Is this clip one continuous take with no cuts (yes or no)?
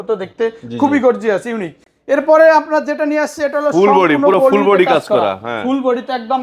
yes